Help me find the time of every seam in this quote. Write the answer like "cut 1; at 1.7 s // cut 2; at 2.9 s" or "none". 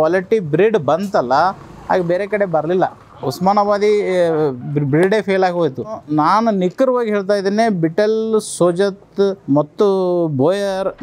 cut 1; at 6.0 s // cut 2; at 9.4 s